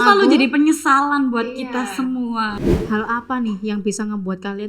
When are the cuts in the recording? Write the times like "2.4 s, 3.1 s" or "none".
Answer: 2.6 s